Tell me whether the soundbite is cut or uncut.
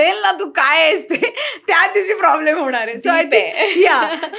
uncut